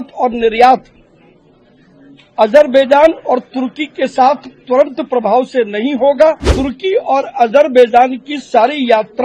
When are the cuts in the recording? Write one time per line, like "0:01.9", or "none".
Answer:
0:06.5